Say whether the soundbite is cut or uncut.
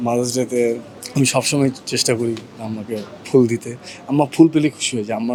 uncut